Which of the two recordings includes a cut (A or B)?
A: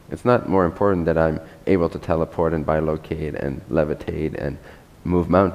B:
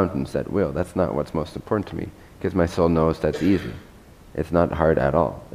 B